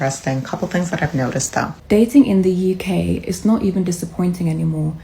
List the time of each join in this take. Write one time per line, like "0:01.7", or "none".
0:01.7